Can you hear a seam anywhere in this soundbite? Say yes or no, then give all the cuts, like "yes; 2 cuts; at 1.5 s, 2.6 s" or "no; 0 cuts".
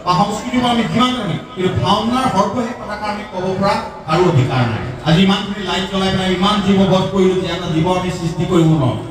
yes; 1 cut; at 4.9 s